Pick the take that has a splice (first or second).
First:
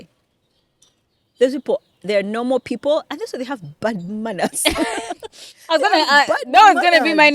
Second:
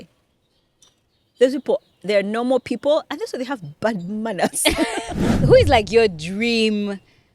second